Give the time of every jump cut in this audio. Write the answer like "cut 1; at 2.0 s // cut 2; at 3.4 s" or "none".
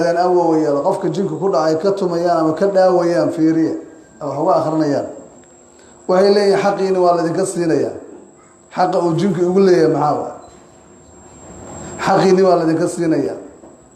none